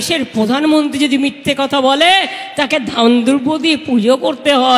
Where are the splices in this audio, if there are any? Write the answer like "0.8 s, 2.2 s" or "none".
none